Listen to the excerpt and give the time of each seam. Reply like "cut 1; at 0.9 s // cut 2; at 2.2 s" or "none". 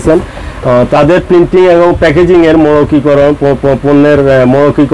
none

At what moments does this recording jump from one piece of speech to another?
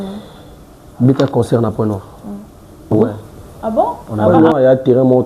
cut 1; at 3.0 s

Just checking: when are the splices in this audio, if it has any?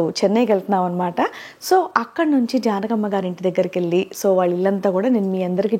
none

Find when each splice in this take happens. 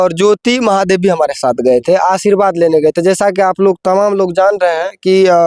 none

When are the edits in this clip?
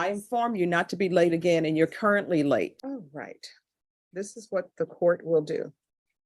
cut 1; at 2.8 s

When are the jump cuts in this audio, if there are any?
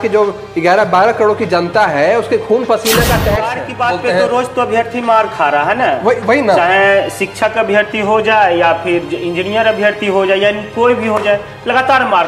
cut 1; at 3.6 s

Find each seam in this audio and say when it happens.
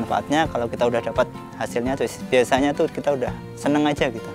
cut 1; at 3.5 s

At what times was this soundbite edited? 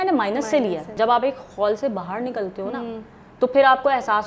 cut 1; at 1.0 s

